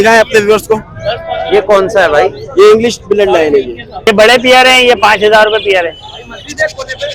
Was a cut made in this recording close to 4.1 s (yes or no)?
yes